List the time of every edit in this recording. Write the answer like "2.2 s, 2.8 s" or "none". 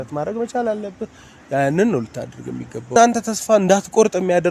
3.0 s